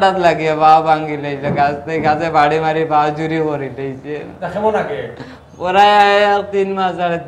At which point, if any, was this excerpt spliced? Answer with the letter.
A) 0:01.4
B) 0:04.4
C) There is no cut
C